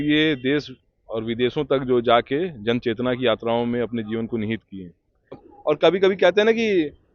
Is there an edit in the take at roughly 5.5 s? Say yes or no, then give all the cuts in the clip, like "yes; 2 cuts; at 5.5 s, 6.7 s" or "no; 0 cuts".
yes; 1 cut; at 5.5 s